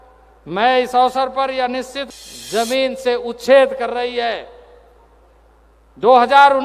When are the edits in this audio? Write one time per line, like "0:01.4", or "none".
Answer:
0:02.0